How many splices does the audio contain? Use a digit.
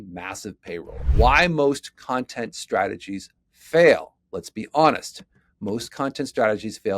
1